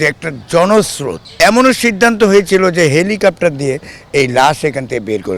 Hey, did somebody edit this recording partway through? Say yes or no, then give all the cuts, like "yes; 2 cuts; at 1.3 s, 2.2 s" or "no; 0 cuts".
yes; 1 cut; at 1.2 s